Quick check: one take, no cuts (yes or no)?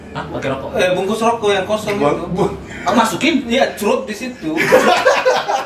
yes